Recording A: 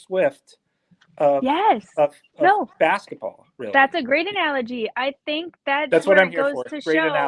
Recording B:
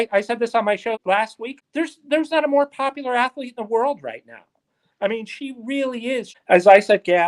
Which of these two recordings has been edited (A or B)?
B